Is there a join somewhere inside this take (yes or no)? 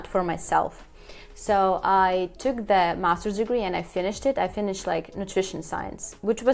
no